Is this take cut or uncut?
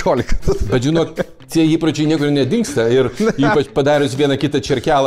uncut